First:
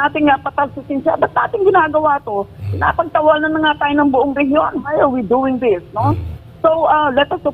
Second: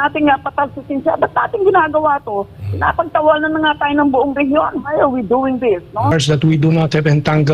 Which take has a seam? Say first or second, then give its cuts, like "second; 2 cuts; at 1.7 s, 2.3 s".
second; 1 cut; at 6.1 s